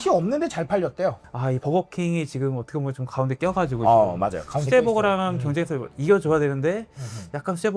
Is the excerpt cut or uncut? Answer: cut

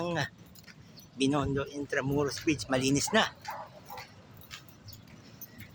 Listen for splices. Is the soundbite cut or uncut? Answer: uncut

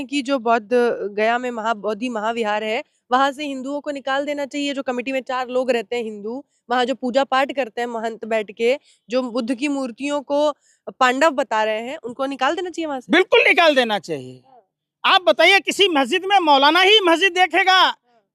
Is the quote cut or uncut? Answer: uncut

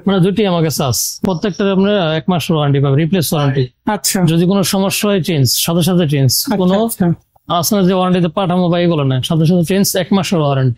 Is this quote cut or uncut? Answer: cut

